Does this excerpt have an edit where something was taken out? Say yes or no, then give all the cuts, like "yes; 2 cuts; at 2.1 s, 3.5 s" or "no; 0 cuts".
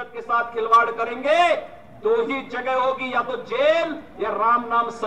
no; 0 cuts